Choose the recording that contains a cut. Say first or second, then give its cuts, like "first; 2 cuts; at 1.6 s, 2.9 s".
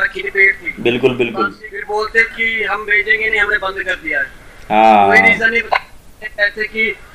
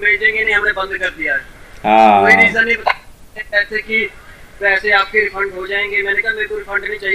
first; 1 cut; at 1.7 s